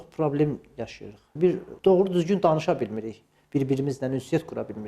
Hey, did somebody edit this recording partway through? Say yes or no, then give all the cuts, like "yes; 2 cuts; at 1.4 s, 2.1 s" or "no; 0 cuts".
no; 0 cuts